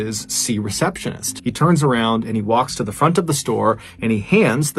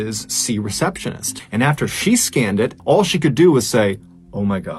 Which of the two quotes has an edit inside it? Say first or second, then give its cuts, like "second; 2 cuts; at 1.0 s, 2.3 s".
second; 2 cuts; at 1.4 s, 2.8 s